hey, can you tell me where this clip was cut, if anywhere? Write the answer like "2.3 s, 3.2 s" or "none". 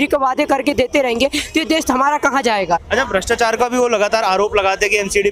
2.8 s